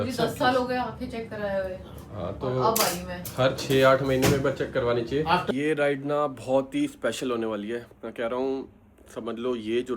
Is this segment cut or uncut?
cut